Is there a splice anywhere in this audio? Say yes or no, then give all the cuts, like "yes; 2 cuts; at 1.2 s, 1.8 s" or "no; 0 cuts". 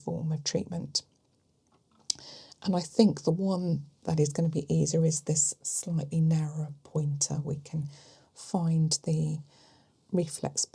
no; 0 cuts